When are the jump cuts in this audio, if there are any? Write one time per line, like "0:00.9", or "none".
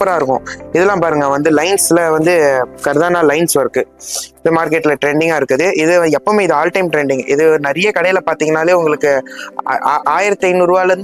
none